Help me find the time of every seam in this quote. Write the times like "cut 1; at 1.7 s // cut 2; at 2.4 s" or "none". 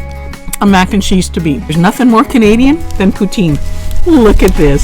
cut 1; at 1.7 s